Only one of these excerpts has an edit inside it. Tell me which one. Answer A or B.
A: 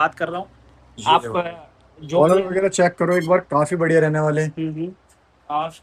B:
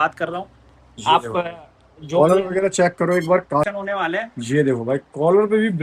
B